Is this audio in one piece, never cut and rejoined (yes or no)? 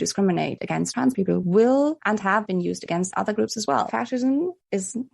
no